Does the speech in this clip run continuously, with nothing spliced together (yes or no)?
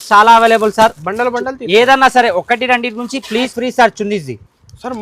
no